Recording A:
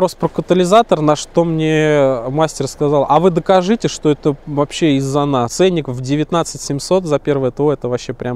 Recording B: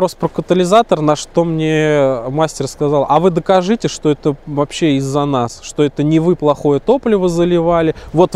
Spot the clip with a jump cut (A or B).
A